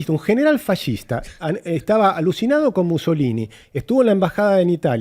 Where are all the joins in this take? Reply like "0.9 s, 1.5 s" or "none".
none